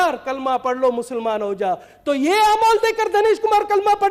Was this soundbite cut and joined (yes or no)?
no